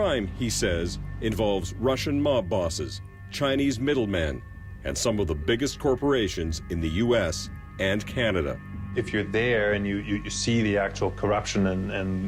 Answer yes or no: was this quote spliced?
no